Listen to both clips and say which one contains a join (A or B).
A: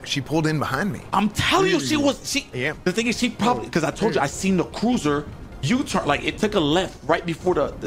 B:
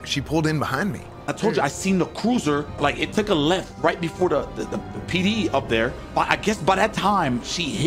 B